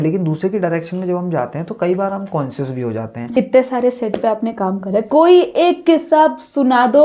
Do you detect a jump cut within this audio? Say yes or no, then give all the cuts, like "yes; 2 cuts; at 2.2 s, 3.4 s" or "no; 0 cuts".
yes; 1 cut; at 3.4 s